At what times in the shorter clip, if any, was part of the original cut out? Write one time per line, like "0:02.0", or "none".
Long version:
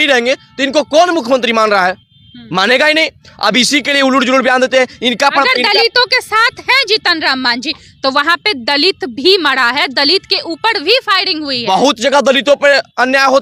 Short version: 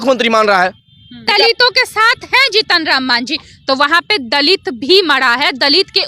0:01.3

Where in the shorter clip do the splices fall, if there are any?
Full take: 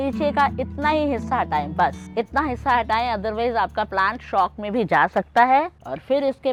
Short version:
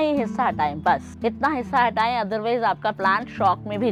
none

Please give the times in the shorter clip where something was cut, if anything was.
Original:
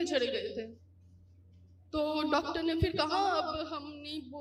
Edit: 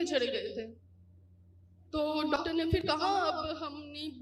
0:02.8

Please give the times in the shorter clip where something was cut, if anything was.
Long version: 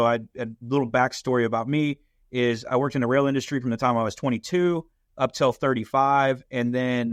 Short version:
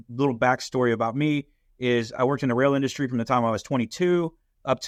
none

